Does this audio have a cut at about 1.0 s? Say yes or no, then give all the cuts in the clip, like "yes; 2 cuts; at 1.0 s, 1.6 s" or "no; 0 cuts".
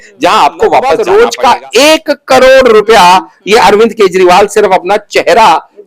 yes; 1 cut; at 1.0 s